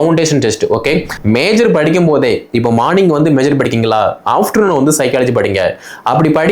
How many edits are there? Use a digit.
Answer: 1